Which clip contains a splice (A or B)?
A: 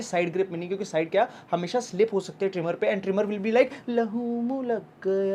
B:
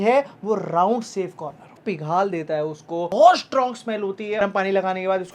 B